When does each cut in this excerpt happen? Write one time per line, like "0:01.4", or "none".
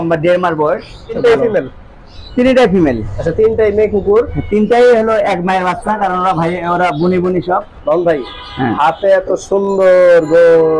0:01.2
0:07.7